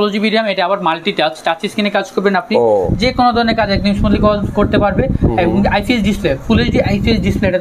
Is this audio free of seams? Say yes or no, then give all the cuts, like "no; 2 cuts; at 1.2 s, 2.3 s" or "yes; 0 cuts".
yes; 0 cuts